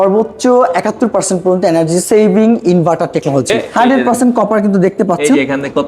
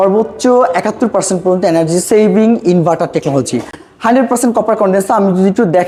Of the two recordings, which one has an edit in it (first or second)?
first